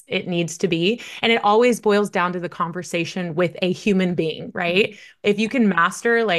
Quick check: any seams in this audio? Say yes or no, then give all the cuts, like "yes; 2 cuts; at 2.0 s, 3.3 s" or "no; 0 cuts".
no; 0 cuts